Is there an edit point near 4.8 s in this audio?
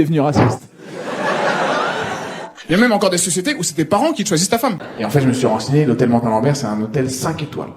yes; 1 cut; at 4.8 s

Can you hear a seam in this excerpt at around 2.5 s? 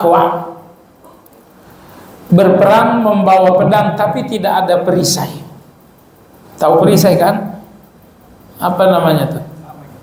no; 0 cuts

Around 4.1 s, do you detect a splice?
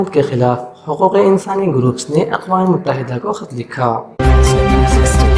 yes; 1 cut; at 4.1 s

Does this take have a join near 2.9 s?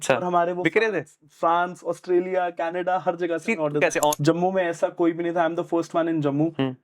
no; 1 cut; at 4.2 s

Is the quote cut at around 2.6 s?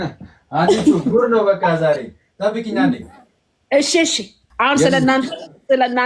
no; 1 cut; at 4.4 s

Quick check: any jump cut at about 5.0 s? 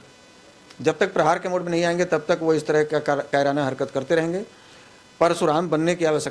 no; 0 cuts

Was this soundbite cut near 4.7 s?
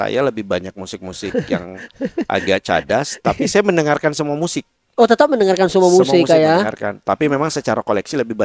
no; 0 cuts

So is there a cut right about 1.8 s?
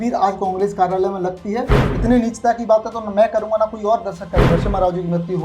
yes; 2 cuts; at 1.8 s, 4.5 s

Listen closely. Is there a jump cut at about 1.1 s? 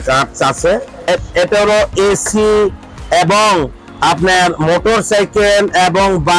yes; 1 cut; at 1.1 s

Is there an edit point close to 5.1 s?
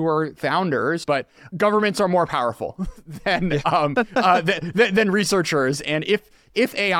no; 1 cut; at 1.1 s

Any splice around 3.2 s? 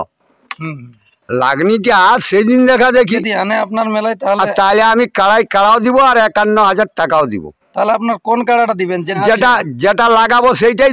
yes; 2 cuts; at 3.2 s, 9.1 s

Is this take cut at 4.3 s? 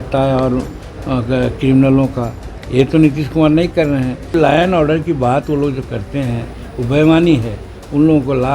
yes; 1 cut; at 4.3 s

